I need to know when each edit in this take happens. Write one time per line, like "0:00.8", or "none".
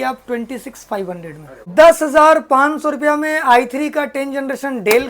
0:01.7